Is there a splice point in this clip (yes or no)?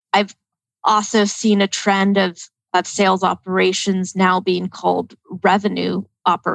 no